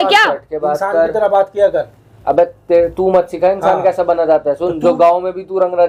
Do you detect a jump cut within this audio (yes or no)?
no